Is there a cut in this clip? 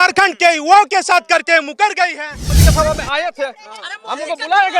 yes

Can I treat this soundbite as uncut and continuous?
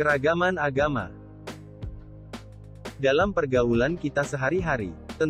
no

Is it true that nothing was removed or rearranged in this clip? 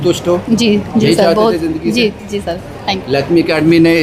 yes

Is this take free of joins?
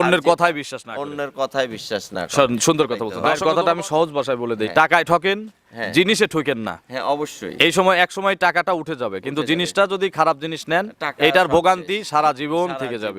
no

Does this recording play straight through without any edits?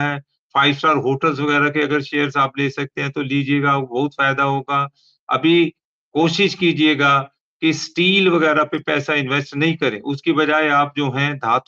yes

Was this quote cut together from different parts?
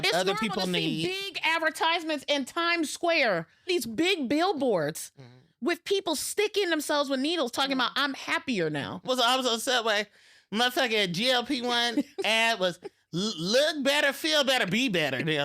yes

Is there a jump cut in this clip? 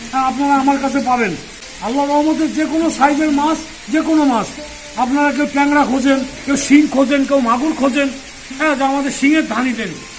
no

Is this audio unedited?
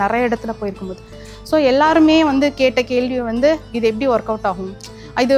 yes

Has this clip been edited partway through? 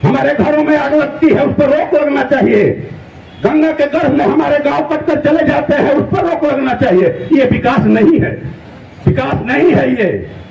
no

